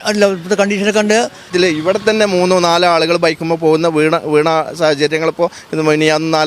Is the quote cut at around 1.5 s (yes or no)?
yes